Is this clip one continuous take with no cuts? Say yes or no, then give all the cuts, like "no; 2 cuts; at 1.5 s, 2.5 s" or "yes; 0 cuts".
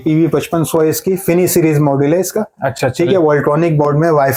yes; 0 cuts